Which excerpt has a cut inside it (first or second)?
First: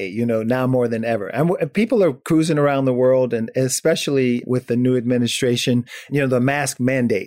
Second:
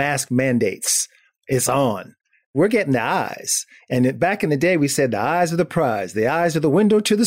second